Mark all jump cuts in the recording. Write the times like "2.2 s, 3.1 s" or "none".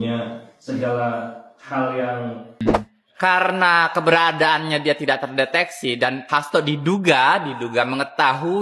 2.6 s

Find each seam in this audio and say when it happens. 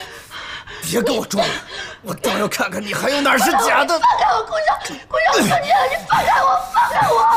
none

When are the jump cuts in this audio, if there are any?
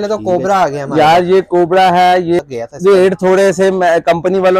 2.4 s

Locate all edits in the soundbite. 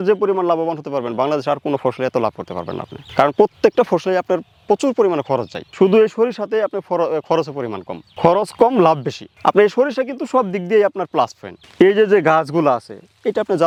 none

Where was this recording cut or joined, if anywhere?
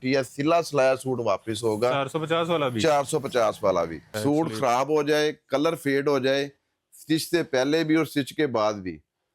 4.1 s

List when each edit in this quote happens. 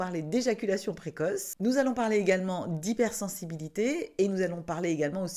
none

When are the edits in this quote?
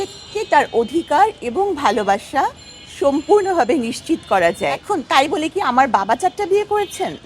4.8 s

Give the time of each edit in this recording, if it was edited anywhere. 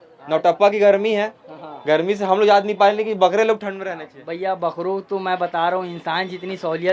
none

